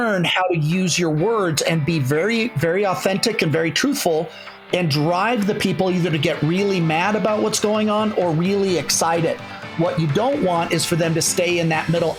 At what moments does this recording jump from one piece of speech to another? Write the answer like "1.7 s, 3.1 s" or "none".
none